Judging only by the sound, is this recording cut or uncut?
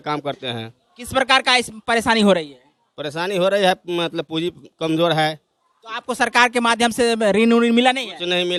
uncut